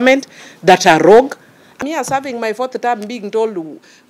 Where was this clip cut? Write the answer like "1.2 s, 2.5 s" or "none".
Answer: 1.8 s